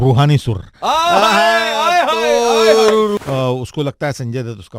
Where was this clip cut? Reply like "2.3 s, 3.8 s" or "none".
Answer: 3.2 s